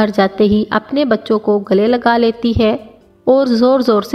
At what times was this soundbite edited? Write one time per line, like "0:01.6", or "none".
none